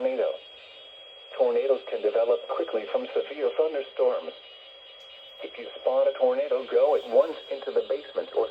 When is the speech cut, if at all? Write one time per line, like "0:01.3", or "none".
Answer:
none